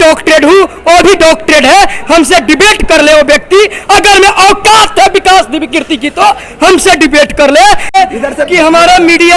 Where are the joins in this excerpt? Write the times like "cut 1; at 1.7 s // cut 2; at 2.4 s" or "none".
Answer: cut 1; at 7.9 s

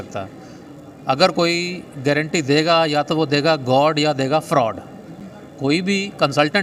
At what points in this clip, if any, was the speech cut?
none

